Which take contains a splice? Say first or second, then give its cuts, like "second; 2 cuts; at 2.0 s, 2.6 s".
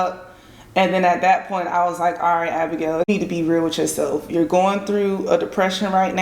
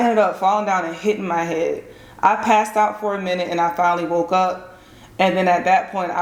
first; 1 cut; at 3.1 s